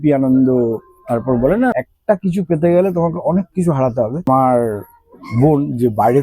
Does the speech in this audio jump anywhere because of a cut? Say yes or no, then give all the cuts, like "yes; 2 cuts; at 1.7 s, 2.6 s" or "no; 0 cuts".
yes; 2 cuts; at 1.7 s, 4.3 s